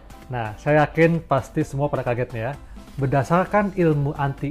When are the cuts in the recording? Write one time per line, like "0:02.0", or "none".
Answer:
0:02.6